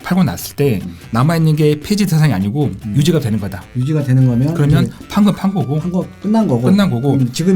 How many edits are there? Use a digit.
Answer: 1